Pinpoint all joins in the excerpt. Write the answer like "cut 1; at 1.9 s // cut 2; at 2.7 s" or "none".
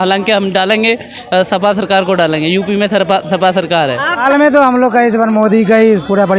cut 1; at 4.2 s